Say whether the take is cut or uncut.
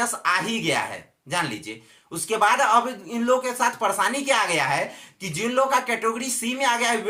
uncut